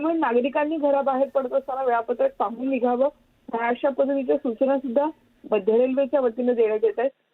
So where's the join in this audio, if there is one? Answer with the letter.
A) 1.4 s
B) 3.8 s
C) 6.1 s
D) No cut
B